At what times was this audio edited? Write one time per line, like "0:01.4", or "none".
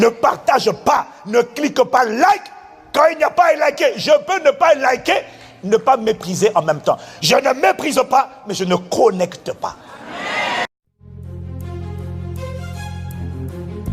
0:10.7